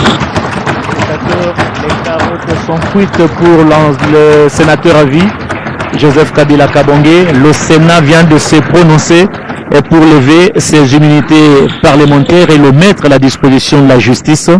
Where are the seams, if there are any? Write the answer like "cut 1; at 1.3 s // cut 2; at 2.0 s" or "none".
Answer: none